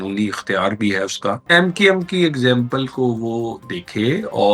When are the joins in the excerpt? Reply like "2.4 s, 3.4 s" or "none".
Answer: 1.4 s